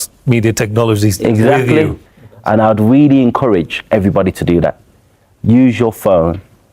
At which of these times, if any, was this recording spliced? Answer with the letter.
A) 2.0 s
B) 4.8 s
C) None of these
A